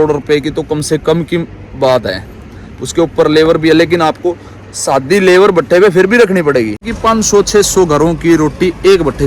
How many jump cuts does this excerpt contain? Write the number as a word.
one